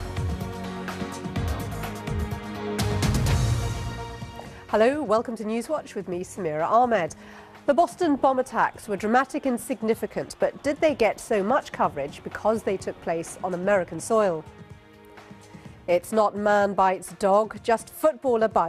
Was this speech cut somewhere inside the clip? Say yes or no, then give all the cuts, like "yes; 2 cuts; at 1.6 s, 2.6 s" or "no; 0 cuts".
no; 0 cuts